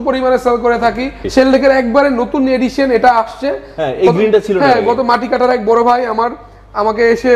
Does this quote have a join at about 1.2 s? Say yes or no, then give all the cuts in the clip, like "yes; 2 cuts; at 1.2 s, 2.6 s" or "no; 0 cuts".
yes; 1 cut; at 1.2 s